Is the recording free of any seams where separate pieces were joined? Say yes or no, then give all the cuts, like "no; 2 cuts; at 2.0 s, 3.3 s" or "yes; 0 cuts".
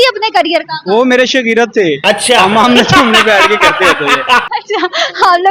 yes; 0 cuts